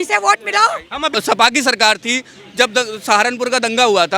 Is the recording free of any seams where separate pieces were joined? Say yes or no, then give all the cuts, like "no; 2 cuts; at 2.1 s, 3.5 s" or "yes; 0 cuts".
no; 1 cut; at 1.0 s